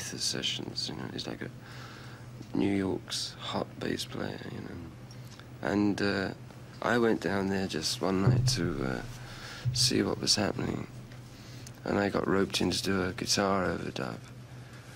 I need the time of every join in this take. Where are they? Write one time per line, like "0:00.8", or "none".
0:02.6

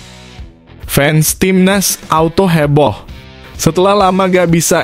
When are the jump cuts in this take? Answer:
0:00.9

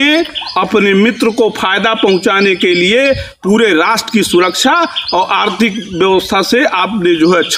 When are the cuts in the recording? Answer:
none

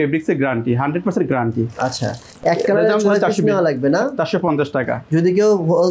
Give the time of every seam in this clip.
none

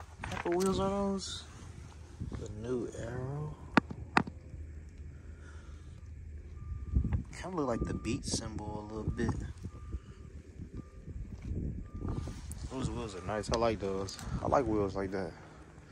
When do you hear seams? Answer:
none

